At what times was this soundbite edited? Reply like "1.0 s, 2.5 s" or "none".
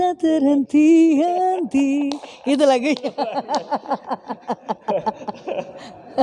none

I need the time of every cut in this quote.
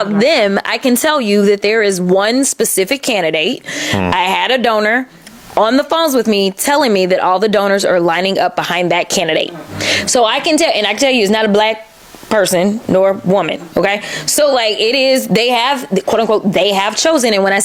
none

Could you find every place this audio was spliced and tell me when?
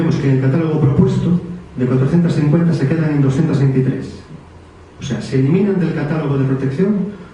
none

